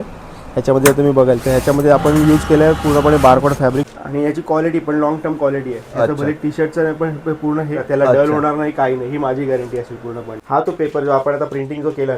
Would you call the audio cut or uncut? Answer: cut